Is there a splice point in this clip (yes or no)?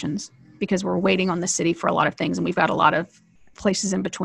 no